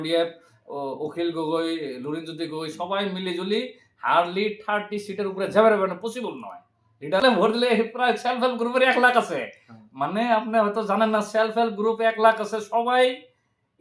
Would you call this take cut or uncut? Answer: cut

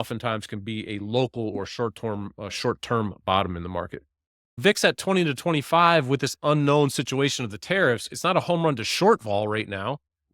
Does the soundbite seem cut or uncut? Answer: cut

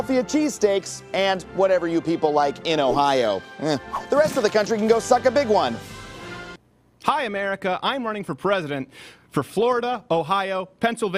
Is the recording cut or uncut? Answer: cut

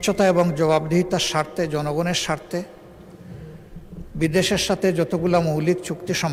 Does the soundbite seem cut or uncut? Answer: uncut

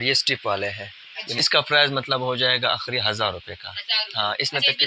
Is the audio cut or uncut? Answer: cut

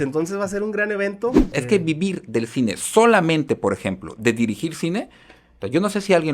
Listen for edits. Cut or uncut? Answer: cut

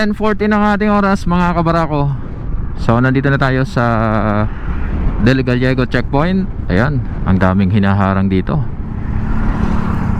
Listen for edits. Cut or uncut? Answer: uncut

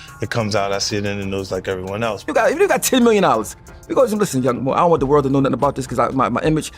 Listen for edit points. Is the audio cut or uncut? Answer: cut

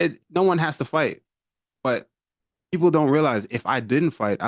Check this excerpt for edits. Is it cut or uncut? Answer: uncut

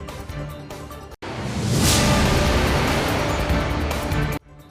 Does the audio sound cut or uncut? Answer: uncut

